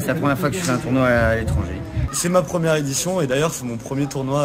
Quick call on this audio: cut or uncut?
cut